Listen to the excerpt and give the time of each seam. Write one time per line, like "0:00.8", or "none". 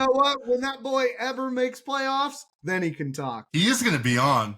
0:03.4

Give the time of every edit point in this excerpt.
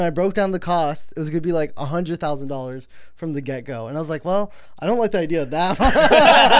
none

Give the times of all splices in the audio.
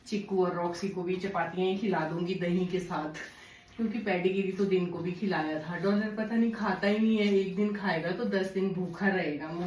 none

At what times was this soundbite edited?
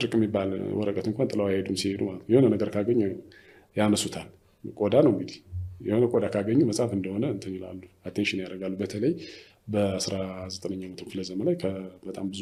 none

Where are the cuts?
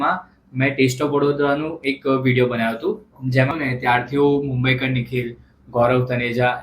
0:03.5

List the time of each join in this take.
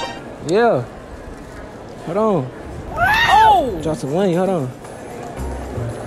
none

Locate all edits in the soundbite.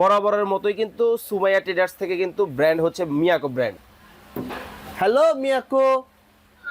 0:03.8

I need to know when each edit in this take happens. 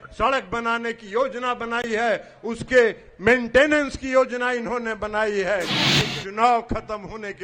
0:05.8

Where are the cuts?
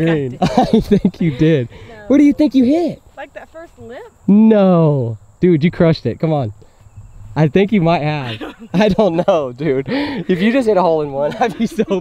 none

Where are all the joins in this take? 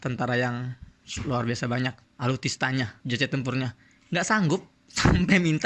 0:02.1
0:03.0

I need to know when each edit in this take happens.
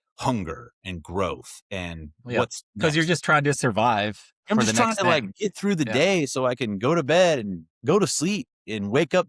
0:07.7

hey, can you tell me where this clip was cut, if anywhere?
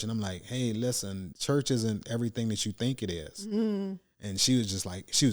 0:01.3

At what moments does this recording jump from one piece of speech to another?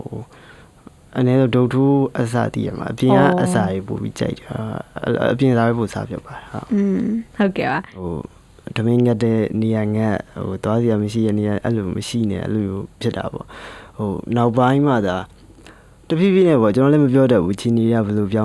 0:08.0

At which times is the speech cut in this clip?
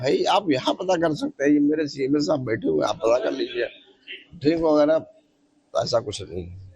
0:03.5

